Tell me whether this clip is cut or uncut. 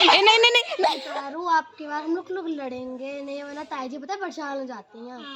cut